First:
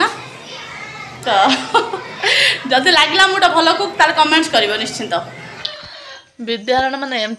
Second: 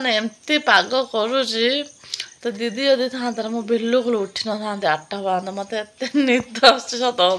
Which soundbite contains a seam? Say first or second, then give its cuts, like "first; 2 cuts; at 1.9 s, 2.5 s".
first; 1 cut; at 5.7 s